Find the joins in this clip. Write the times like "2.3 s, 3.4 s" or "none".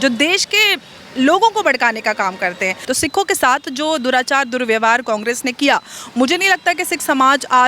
2.8 s